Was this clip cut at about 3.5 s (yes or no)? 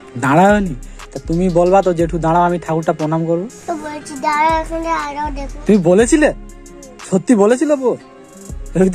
yes